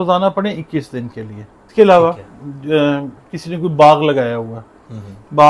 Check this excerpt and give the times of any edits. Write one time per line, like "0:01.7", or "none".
0:01.7